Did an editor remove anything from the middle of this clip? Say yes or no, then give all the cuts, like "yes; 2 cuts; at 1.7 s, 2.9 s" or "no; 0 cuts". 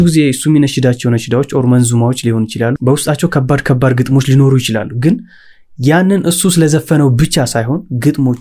no; 0 cuts